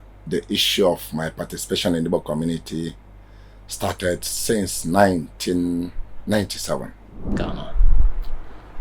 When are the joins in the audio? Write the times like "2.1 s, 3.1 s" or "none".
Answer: 7.3 s